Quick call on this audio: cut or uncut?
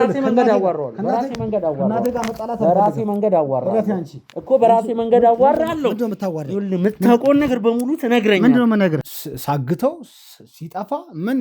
cut